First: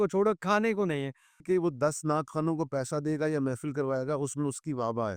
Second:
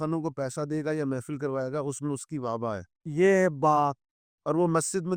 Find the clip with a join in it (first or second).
first